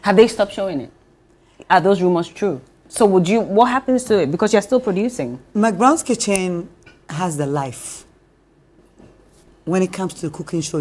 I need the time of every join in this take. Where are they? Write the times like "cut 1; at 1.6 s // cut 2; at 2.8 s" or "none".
cut 1; at 2.8 s